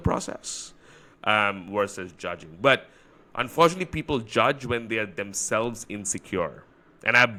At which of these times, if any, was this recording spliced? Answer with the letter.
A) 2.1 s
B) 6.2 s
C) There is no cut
C